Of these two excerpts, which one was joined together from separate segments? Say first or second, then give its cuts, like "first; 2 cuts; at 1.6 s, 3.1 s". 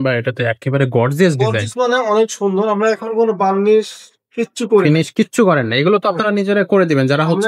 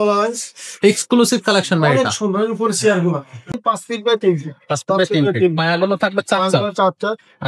second; 1 cut; at 3.5 s